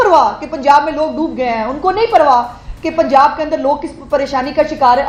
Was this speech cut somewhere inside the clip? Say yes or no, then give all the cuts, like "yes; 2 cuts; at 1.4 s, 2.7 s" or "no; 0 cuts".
no; 0 cuts